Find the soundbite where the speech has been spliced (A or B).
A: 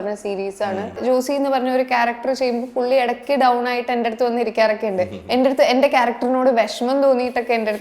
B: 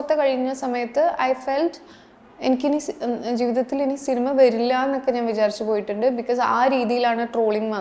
A